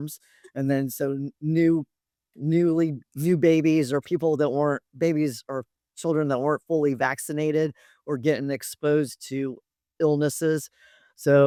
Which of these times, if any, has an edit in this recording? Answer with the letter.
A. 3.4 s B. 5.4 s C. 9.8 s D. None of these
D